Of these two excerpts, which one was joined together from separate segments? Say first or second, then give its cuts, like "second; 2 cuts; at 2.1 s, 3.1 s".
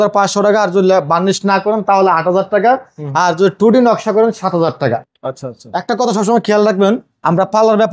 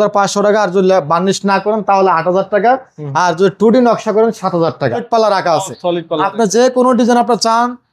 second; 1 cut; at 5.0 s